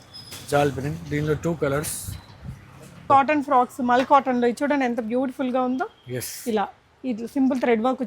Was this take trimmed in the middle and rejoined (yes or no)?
yes